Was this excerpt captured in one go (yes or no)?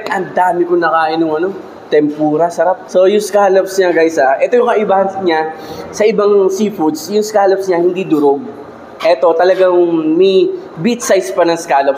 no